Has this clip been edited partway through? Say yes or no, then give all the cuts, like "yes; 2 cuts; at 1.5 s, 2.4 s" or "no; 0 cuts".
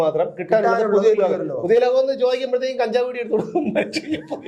no; 0 cuts